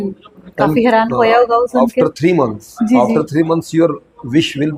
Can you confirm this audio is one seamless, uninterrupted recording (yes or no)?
yes